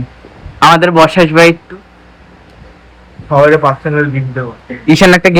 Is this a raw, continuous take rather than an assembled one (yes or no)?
yes